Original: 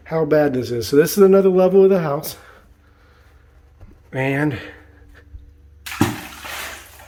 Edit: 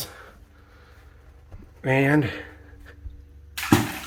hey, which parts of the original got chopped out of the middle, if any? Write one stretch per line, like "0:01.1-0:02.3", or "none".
none